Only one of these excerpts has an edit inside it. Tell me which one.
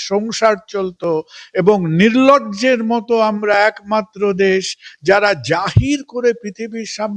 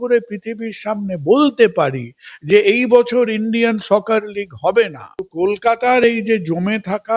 second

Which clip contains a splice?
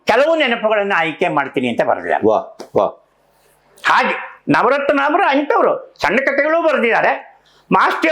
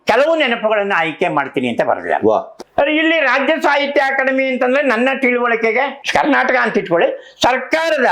second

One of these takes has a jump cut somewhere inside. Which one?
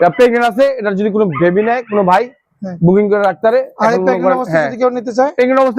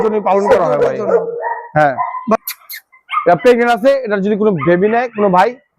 second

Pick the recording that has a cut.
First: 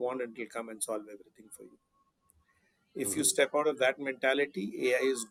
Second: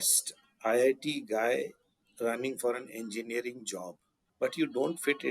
second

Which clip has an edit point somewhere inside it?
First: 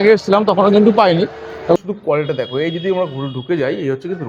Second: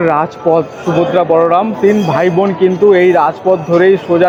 first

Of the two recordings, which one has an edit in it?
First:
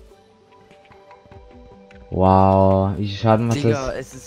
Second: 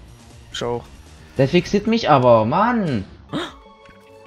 second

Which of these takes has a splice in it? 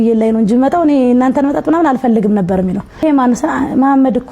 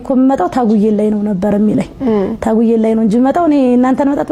first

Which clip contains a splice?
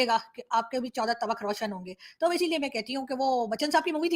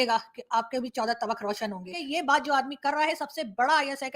second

